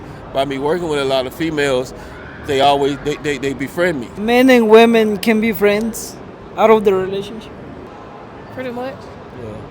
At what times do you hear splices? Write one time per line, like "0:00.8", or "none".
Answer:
0:04.1
0:07.9